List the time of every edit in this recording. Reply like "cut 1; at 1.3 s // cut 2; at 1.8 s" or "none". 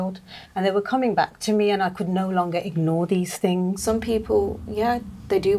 cut 1; at 3.8 s